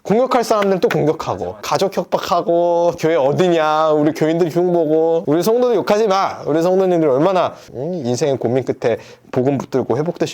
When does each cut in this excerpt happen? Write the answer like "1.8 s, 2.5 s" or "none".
1.6 s, 3.0 s